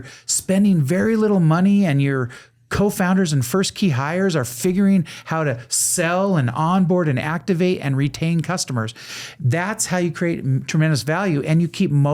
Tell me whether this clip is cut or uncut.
uncut